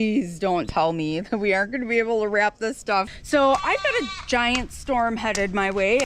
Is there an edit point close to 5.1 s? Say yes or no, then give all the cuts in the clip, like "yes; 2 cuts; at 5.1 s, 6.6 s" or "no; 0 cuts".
no; 1 cut; at 3.1 s